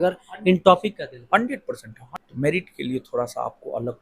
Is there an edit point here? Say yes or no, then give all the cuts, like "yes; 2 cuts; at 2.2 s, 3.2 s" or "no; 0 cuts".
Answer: yes; 1 cut; at 1.9 s